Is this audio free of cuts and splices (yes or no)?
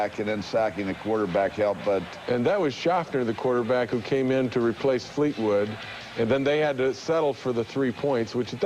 no